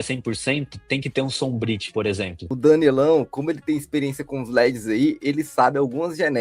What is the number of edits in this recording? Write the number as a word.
one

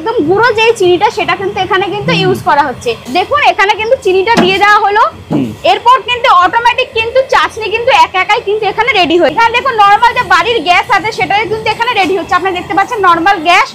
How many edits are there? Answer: two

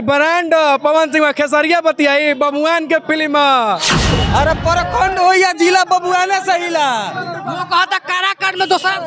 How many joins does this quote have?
one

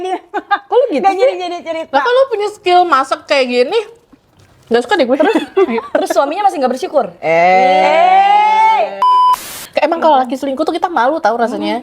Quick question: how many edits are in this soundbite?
one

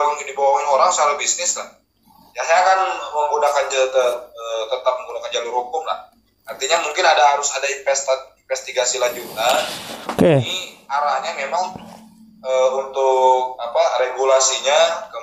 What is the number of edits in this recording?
zero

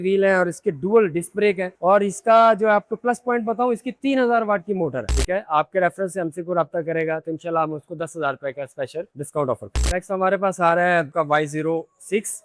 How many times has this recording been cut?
one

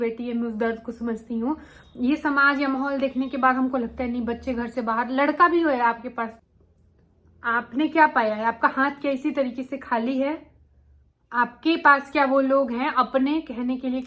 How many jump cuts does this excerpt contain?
one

